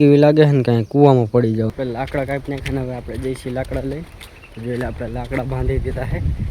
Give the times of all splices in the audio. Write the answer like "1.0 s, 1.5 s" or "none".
1.7 s